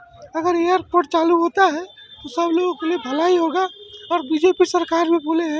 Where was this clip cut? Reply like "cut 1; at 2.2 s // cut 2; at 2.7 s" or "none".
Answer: none